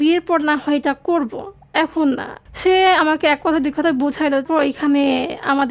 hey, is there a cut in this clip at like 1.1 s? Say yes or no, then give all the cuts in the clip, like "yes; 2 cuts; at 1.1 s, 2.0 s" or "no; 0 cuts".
no; 2 cuts; at 2.3 s, 4.5 s